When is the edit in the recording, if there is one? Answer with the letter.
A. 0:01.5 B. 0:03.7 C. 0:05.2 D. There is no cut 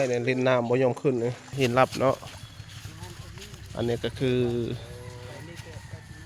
A